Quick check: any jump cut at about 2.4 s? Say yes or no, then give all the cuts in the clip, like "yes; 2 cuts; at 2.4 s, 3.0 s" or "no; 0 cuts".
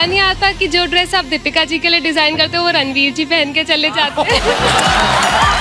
no; 0 cuts